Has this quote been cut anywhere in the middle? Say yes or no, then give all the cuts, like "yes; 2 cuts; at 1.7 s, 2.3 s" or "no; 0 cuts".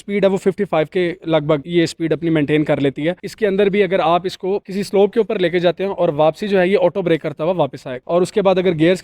yes; 2 cuts; at 3.2 s, 8.0 s